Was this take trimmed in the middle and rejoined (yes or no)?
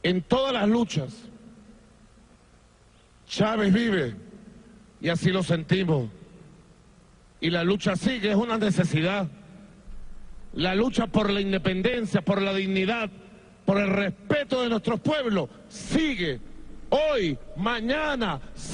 yes